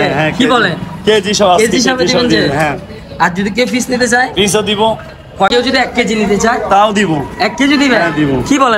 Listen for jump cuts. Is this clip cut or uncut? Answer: cut